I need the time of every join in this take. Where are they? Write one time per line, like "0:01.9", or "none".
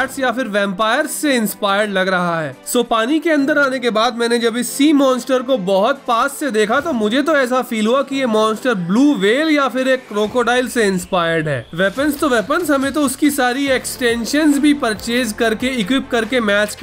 0:02.6
0:11.6